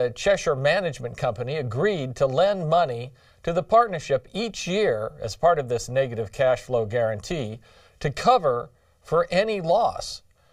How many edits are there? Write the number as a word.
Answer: zero